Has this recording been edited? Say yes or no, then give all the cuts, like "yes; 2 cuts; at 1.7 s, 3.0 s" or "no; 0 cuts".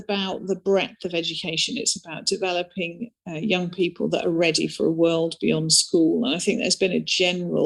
no; 0 cuts